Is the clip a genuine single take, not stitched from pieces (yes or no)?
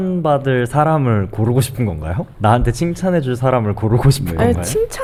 yes